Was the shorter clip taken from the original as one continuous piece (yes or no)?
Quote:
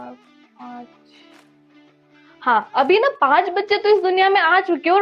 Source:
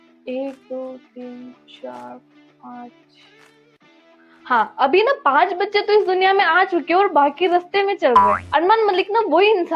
yes